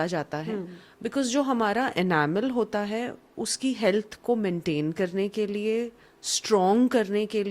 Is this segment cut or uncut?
uncut